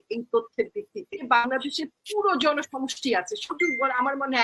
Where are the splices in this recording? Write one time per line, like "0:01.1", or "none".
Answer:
0:01.2